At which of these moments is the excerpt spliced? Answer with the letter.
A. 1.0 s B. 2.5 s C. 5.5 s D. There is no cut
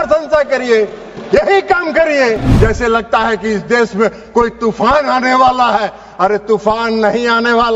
B